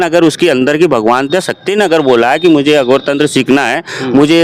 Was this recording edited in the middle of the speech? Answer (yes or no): no